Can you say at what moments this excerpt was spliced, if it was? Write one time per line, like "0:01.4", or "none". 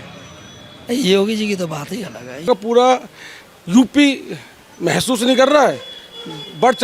0:02.5